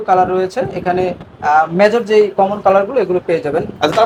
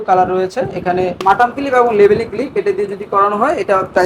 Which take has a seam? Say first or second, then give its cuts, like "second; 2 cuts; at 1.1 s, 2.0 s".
second; 1 cut; at 1.2 s